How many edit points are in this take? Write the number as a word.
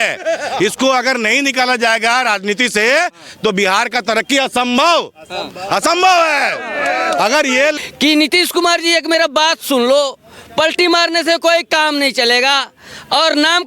one